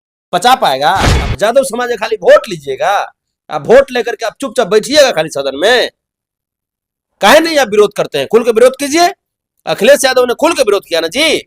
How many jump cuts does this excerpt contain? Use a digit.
1